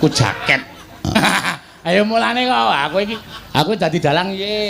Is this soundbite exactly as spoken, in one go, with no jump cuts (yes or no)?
no